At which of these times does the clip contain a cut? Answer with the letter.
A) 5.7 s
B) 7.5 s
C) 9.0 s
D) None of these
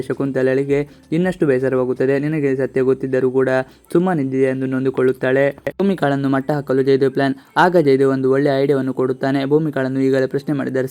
A